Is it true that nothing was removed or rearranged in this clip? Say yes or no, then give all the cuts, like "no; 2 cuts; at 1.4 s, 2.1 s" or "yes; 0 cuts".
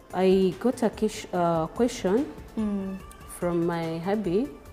yes; 0 cuts